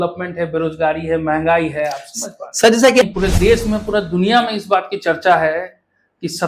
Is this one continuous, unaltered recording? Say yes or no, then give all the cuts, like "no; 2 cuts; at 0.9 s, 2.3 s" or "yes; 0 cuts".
no; 1 cut; at 3.0 s